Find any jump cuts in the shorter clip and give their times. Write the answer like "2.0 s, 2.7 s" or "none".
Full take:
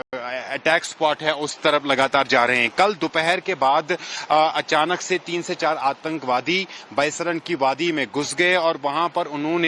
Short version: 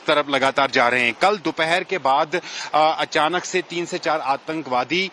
none